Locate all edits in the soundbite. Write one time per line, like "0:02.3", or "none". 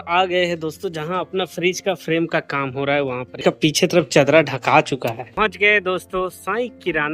0:03.4
0:05.4